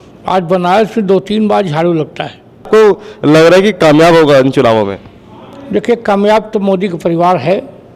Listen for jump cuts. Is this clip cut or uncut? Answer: cut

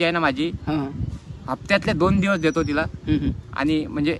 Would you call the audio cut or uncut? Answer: uncut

